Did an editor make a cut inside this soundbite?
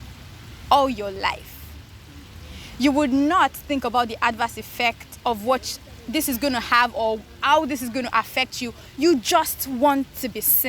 no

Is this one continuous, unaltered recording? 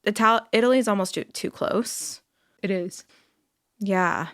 no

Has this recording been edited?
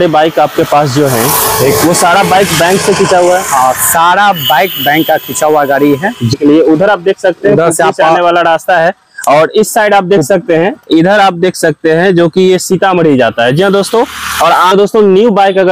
yes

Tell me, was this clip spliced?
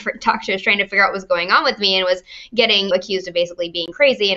no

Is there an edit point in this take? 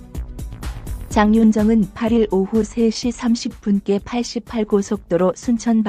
yes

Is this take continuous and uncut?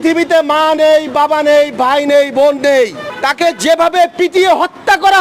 no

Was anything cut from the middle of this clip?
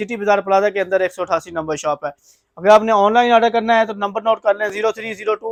no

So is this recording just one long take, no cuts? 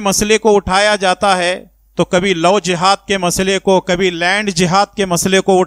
yes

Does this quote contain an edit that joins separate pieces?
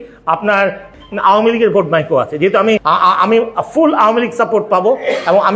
yes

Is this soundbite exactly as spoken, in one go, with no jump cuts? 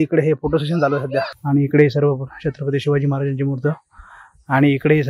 no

